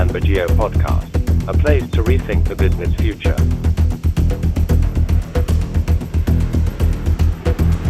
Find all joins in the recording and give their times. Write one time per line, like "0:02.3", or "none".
none